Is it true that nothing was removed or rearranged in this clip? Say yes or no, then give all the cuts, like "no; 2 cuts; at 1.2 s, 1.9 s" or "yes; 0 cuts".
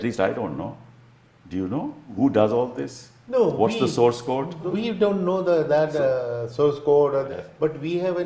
no; 3 cuts; at 2.1 s, 4.7 s, 7.3 s